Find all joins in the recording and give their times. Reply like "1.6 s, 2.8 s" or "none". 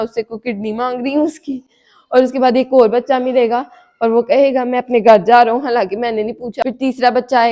6.5 s